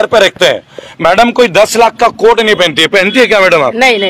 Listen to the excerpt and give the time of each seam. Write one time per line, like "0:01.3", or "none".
none